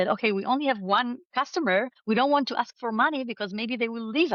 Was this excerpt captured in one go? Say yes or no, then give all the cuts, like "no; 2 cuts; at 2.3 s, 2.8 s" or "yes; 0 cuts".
yes; 0 cuts